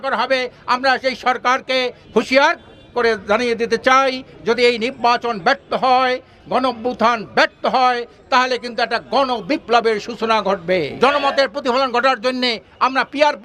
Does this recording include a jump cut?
yes; 2 cuts; at 2.0 s, 10.9 s

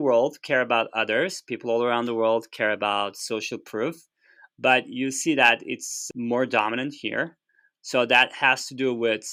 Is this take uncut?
yes; 0 cuts

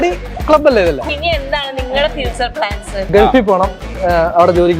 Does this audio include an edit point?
yes; 2 cuts; at 1.1 s, 3.1 s

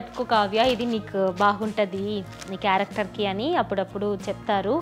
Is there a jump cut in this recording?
no; 0 cuts

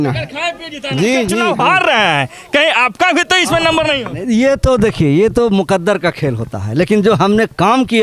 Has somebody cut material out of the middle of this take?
yes; 1 cut; at 1.5 s

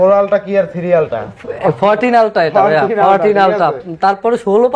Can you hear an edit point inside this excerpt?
no; 0 cuts

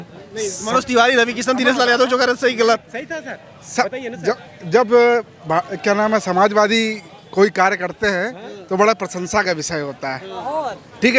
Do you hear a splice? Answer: no; 0 cuts

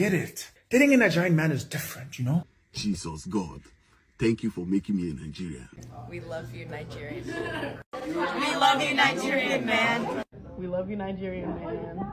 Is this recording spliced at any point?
yes; 1 cut; at 2.5 s

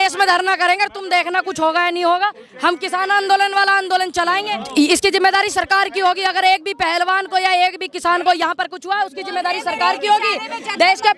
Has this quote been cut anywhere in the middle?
yes; 1 cut; at 4.5 s

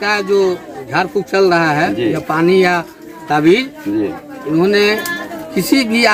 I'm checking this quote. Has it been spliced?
no; 0 cuts

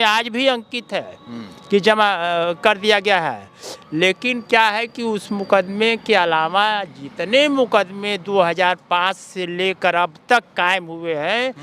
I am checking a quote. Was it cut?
no; 0 cuts

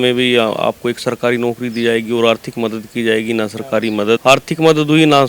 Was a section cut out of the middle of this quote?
yes; 1 cut; at 4.2 s

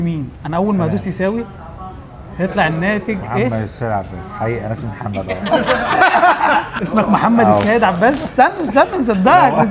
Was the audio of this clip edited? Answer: yes; 1 cut; at 6.8 s

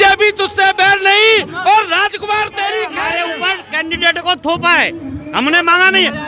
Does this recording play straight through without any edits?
no; 1 cut; at 3.0 s

